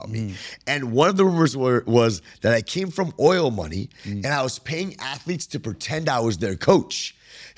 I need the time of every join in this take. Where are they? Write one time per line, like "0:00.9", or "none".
none